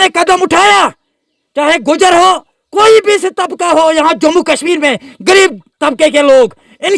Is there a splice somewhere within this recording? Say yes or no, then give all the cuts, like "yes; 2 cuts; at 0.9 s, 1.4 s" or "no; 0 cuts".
no; 0 cuts